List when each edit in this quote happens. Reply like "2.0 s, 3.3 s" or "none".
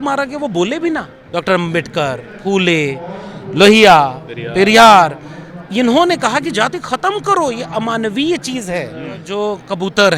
1.2 s, 9.2 s